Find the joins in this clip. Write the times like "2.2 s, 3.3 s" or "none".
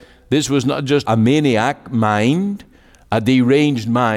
1.0 s